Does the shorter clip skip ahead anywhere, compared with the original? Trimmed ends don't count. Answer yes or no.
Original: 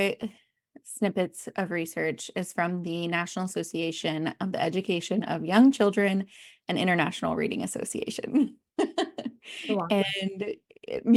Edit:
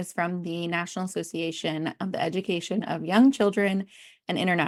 no